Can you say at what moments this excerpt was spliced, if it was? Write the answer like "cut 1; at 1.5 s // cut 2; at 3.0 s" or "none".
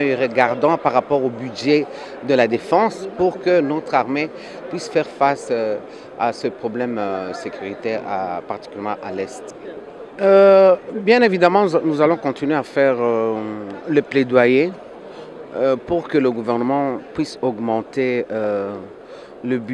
none